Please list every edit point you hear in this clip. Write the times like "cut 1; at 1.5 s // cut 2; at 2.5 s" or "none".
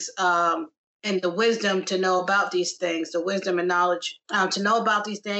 cut 1; at 4.2 s